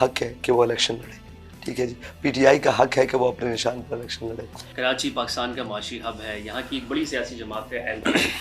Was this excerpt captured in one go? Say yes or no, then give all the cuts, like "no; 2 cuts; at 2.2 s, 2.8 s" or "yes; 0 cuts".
yes; 0 cuts